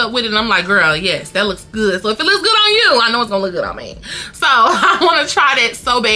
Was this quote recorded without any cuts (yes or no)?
yes